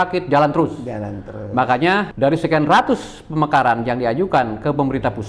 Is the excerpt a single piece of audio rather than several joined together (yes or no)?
no